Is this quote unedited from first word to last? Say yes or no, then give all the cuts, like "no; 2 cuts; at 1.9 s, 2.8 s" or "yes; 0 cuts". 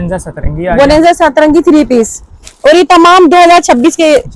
yes; 0 cuts